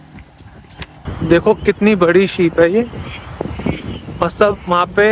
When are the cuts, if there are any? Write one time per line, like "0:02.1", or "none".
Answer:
0:01.0